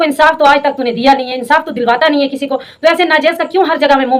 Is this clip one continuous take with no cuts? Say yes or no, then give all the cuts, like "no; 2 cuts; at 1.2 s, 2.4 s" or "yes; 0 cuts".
yes; 0 cuts